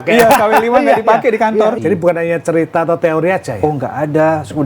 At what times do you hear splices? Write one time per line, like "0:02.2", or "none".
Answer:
0:01.8

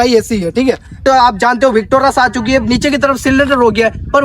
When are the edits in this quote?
0:01.0

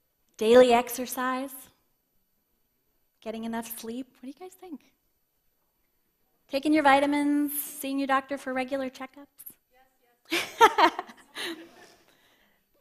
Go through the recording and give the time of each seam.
0:11.5

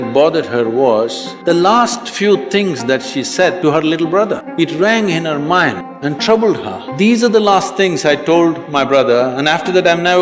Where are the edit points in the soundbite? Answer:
0:01.3
0:03.6
0:04.4
0:05.9
0:06.8

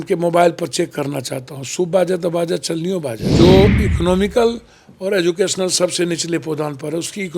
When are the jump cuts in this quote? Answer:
0:03.2

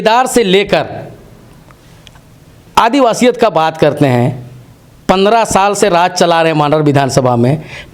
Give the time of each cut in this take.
none

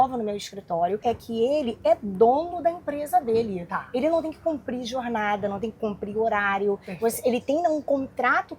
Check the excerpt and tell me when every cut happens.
0:01.0

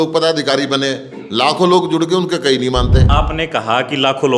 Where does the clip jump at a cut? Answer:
0:03.0

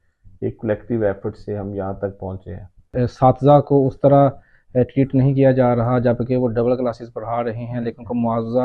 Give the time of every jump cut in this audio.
0:02.9

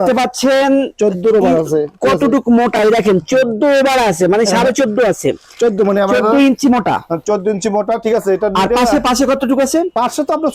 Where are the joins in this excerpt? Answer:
none

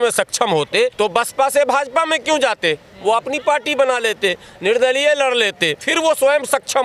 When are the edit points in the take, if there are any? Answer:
0:00.9
0:05.9

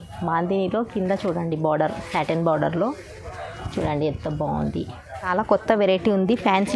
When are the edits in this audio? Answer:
0:05.3

